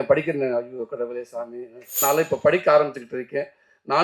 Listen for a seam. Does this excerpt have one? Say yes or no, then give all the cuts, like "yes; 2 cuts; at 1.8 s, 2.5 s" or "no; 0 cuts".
yes; 1 cut; at 2.0 s